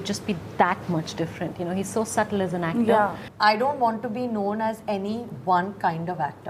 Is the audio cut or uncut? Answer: cut